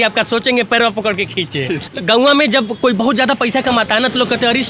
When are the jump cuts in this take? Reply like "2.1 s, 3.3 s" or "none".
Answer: 1.9 s